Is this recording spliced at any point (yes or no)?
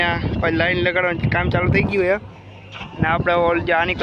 no